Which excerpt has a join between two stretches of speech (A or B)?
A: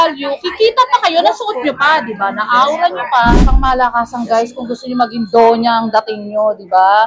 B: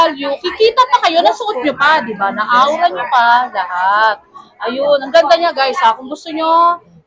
A